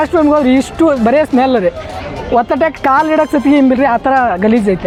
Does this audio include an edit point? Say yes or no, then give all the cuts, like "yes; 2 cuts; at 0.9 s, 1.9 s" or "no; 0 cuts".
no; 0 cuts